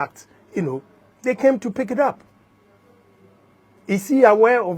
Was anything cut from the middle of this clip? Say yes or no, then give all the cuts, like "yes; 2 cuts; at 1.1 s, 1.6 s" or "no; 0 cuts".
no; 0 cuts